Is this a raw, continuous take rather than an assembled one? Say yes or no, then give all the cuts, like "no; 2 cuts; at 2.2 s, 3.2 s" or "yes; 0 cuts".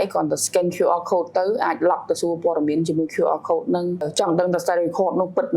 no; 1 cut; at 4.1 s